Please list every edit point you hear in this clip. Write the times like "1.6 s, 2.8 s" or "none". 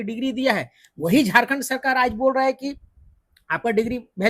none